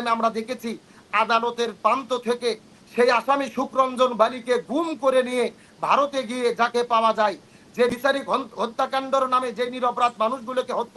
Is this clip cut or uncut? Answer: cut